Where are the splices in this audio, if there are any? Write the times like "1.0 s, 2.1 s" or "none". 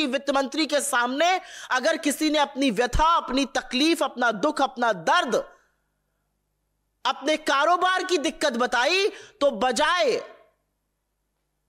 none